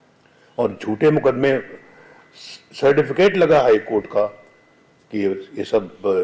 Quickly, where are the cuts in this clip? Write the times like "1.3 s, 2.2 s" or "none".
none